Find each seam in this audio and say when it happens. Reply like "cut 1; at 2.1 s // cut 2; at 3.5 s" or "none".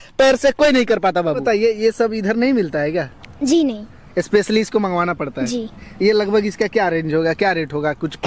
cut 1; at 1.4 s